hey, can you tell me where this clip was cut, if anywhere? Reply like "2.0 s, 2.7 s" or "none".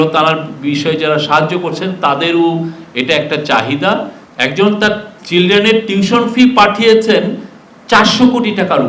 4.2 s